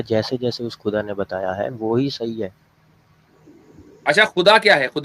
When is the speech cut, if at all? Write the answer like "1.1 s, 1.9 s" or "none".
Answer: none